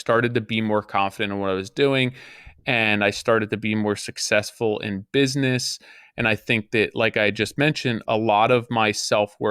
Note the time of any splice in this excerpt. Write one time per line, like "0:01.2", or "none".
none